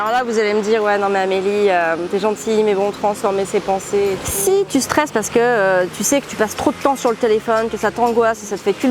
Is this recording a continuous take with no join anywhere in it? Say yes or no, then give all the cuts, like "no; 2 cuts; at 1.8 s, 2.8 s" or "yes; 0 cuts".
no; 1 cut; at 4.3 s